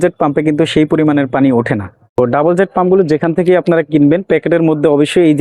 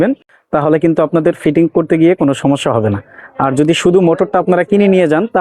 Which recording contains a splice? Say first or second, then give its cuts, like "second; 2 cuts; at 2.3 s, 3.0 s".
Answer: first; 1 cut; at 2.2 s